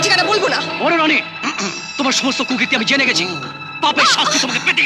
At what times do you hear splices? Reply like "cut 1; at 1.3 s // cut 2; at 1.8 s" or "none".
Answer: none